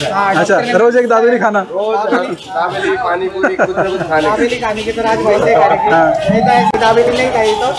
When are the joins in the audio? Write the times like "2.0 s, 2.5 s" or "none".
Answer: 6.7 s